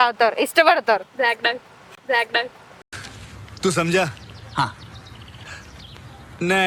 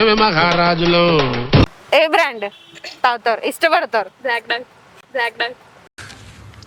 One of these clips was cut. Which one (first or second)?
second